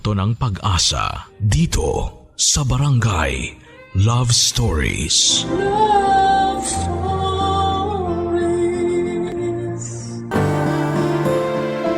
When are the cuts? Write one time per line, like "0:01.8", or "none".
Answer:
0:10.1

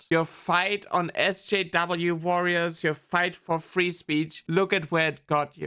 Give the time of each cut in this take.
0:03.4
0:04.4

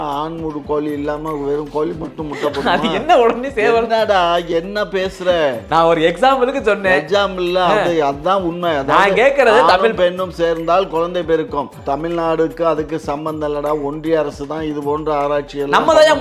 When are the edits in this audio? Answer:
0:11.8

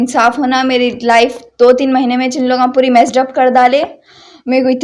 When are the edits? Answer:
none

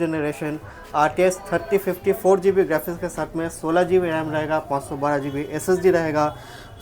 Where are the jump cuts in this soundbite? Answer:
none

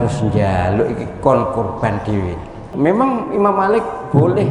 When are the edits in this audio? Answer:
0:02.7

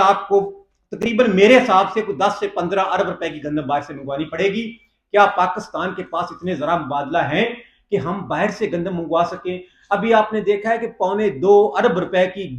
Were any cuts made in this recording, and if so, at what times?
none

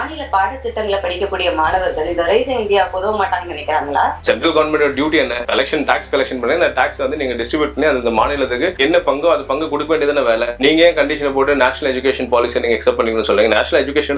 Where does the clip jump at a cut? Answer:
0:04.2

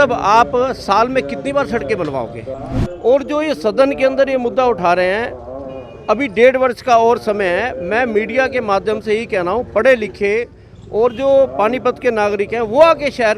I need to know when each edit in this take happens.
0:02.5

